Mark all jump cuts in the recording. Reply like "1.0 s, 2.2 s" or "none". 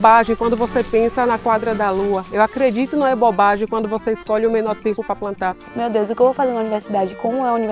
5.7 s

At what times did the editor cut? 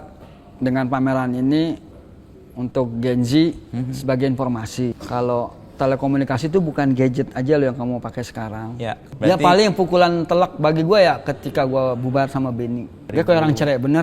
5.0 s, 9.2 s, 13.0 s

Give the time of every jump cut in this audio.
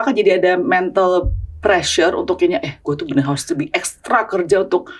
none

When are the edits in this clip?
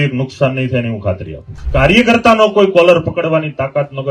1.6 s

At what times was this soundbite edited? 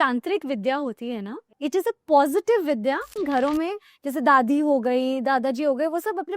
1.5 s, 3.1 s

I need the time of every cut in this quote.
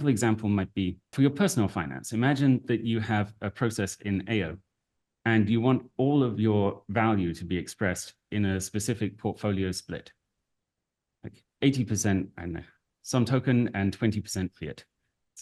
1.1 s

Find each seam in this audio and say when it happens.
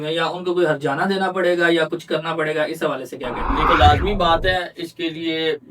3.6 s

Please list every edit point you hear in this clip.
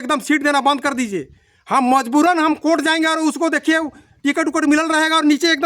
none

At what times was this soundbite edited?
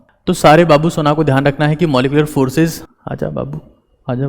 2.8 s

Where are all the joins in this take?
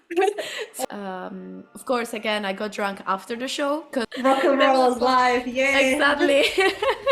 0.9 s, 4.1 s

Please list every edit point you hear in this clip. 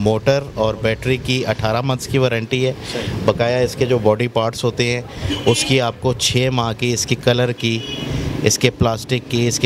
none

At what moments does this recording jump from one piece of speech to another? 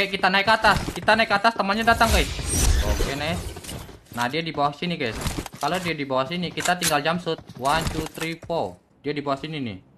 2.7 s, 8.9 s

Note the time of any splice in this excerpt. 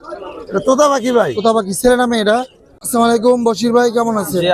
2.6 s

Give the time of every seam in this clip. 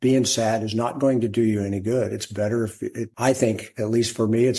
3.1 s

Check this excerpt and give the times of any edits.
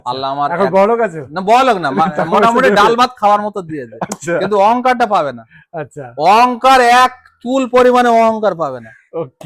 none

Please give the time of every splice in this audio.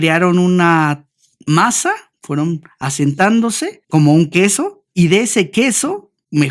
2.1 s, 3.7 s, 4.8 s

